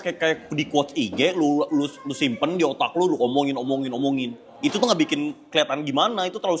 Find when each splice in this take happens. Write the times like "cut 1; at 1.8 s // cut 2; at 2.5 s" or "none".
none